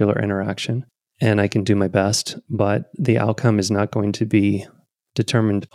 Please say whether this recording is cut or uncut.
uncut